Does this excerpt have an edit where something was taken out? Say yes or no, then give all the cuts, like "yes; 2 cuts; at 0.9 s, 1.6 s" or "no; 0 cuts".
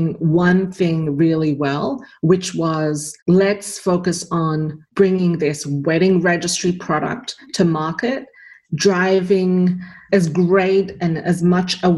yes; 2 cuts; at 3.1 s, 4.8 s